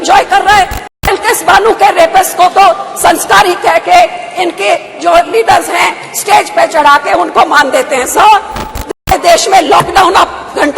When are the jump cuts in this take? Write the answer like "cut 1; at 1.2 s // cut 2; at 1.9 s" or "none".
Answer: cut 1; at 1.0 s // cut 2; at 9.0 s